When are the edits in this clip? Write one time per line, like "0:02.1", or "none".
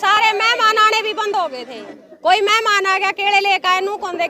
none

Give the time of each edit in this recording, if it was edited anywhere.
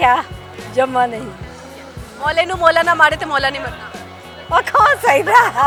none

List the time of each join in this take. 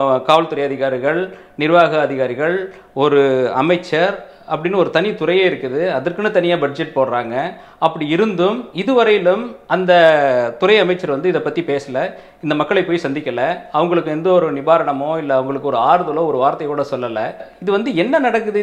0:17.5

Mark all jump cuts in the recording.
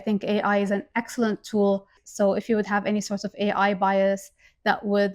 0:02.0

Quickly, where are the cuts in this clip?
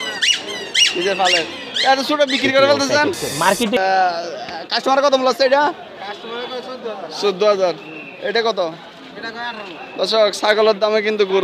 0:03.8

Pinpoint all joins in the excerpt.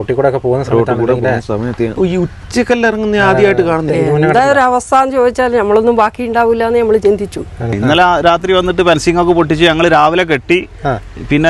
0:01.9
0:03.9
0:07.7

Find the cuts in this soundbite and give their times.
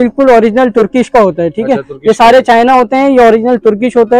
none

